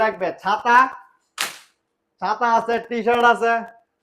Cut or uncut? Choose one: uncut